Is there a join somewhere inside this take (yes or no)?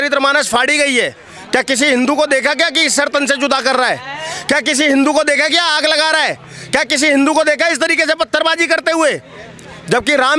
no